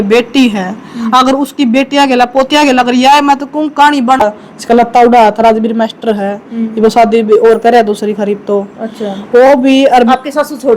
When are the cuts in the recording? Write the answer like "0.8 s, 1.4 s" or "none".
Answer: 4.2 s